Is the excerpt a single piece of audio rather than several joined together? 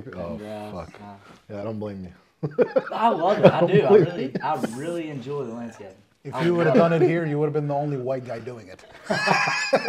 yes; 0 cuts

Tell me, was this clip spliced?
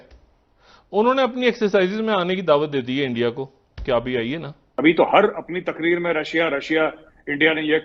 yes; 1 cut; at 4.6 s

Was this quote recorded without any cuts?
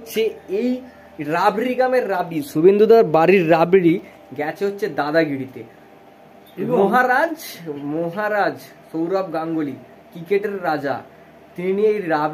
yes; 0 cuts

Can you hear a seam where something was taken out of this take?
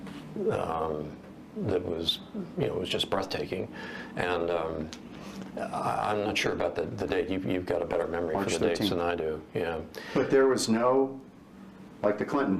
no; 0 cuts

